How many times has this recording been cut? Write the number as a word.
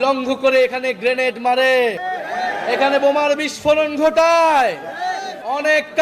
one